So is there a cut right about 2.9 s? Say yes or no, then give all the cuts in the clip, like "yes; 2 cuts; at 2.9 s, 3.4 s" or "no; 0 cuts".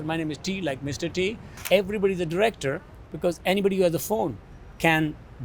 no; 1 cut; at 1.6 s